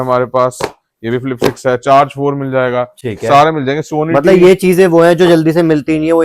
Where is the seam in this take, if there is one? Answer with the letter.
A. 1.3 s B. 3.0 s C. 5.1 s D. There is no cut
D